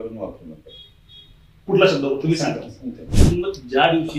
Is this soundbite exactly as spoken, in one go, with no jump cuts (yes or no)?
no